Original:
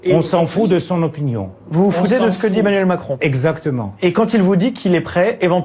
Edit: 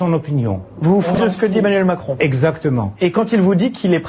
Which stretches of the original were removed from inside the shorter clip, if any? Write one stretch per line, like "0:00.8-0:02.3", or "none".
0:02.1-0:02.2